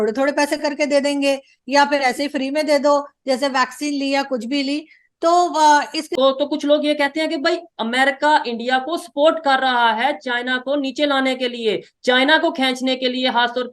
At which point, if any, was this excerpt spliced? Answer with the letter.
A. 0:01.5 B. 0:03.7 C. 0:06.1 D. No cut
C